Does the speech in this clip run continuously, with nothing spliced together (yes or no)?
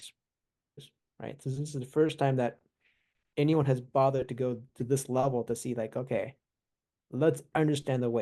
no